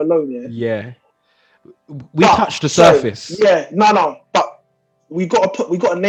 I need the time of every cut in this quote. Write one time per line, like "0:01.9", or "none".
none